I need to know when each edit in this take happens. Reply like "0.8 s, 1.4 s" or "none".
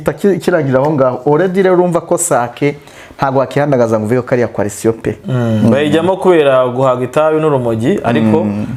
none